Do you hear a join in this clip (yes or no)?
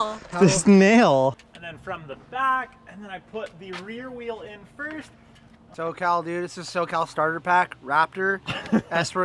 yes